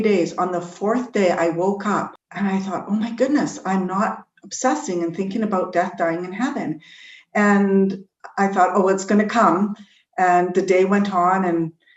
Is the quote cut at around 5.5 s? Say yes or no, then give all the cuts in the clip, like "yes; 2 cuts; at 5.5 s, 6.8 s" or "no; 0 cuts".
no; 1 cut; at 2.2 s